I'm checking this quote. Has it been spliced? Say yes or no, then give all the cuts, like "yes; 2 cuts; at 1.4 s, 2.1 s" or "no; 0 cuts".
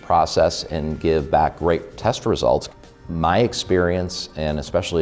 yes; 1 cut; at 2.8 s